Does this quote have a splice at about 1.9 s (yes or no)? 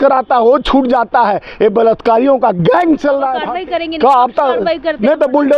no